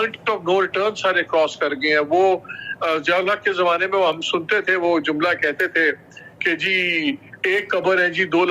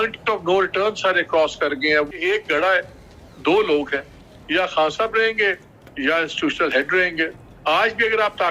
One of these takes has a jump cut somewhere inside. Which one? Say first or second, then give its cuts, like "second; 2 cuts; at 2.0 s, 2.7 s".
second; 2 cuts; at 2.1 s, 7.3 s